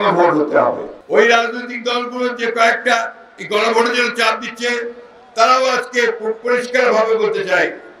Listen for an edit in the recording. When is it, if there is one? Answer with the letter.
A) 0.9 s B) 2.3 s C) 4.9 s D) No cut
A